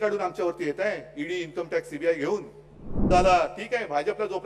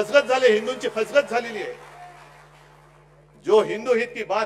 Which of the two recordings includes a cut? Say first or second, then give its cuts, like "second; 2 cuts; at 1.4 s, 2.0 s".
first; 1 cut; at 3.1 s